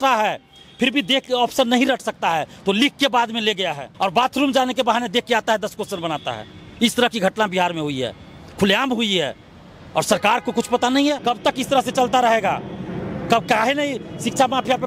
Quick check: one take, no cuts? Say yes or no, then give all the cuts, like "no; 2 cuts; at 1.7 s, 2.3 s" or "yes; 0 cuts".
no; 2 cuts; at 3.8 s, 11.2 s